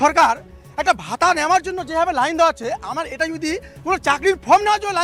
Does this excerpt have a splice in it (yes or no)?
no